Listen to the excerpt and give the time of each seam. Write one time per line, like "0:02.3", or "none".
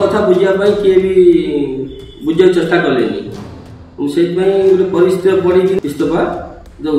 0:05.8